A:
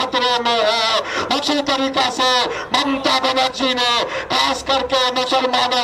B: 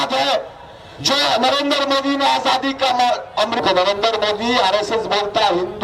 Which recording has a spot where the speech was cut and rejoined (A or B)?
B